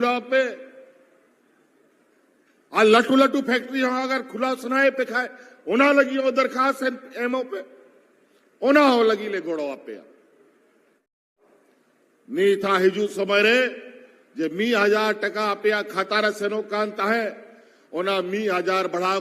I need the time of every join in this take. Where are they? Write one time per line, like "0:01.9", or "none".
0:11.5